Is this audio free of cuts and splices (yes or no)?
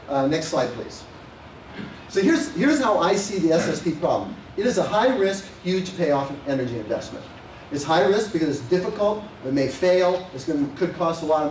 yes